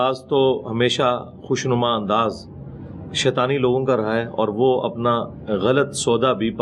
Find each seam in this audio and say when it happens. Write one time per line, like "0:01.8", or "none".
none